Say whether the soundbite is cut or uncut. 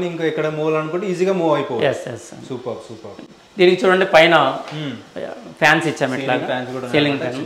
uncut